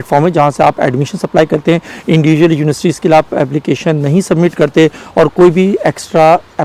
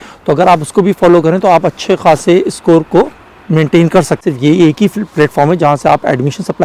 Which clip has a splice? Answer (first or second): second